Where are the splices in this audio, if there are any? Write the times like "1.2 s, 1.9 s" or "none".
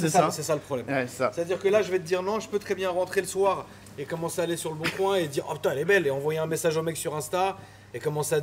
none